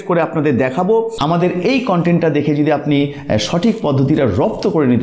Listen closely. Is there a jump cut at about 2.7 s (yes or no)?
no